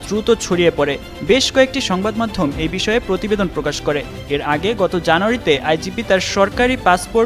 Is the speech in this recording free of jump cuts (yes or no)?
yes